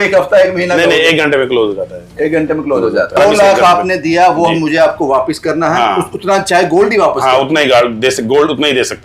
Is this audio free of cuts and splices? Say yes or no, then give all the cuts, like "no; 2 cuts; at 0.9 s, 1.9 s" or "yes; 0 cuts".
no; 1 cut; at 3.2 s